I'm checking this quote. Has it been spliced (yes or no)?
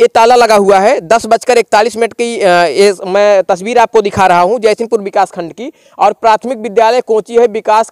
no